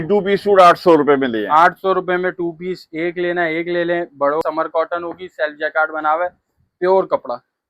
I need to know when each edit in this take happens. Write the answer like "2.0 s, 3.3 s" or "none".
4.4 s

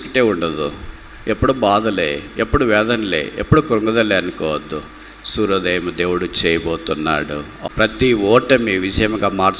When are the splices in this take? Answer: 7.5 s

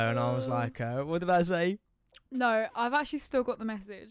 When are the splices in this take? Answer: none

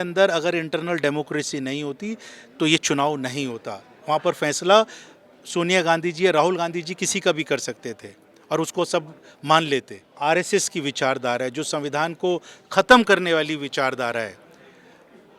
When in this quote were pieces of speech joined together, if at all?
10.0 s

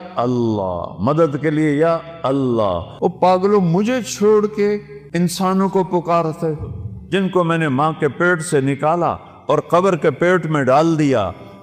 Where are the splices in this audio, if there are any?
2.9 s, 5.0 s

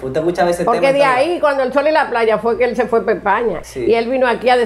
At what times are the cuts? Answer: 3.6 s

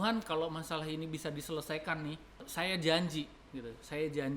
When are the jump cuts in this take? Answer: 2.5 s

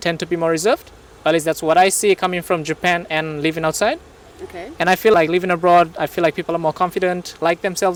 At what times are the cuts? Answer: none

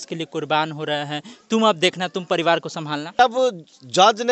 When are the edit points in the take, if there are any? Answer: 3.2 s

